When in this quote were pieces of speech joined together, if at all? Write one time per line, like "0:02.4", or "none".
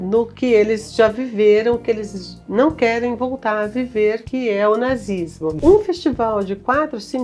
0:04.2
0:05.6